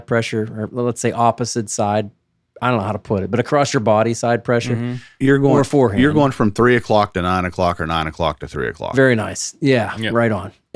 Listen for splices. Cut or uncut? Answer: uncut